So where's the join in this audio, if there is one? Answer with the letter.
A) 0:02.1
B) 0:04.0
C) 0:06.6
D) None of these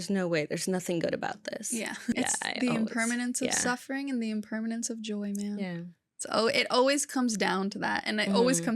A